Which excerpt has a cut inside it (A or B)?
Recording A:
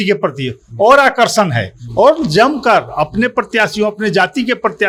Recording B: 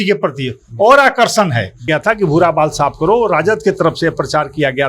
B